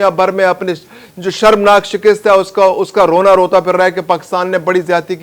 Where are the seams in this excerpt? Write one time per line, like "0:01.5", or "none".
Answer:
none

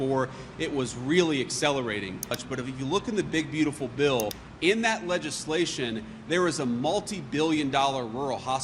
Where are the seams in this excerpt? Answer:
0:02.4
0:04.4

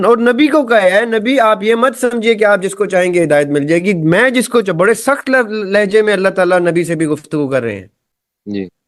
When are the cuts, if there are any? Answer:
none

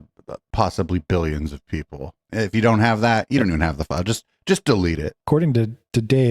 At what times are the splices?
0:02.2
0:05.2

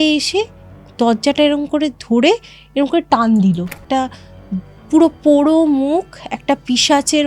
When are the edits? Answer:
0:03.8

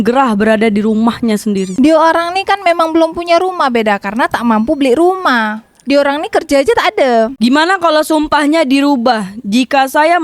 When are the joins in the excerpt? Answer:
0:01.7
0:07.3

